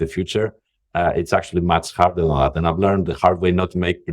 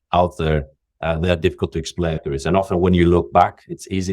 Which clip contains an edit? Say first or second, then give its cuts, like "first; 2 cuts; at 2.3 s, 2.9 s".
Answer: second; 1 cut; at 2.2 s